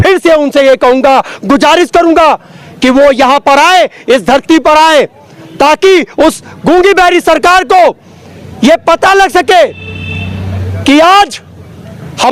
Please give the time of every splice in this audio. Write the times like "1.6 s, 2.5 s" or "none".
none